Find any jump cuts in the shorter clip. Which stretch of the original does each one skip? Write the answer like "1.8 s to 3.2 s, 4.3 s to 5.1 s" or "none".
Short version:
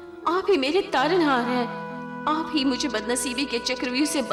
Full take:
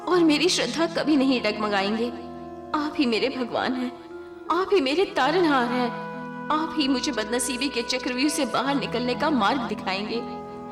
none